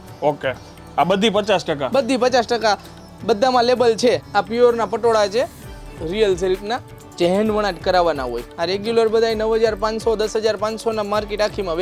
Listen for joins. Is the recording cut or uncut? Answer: cut